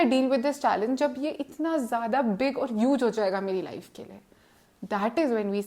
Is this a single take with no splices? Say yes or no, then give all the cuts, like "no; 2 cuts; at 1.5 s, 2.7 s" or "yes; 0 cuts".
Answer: yes; 0 cuts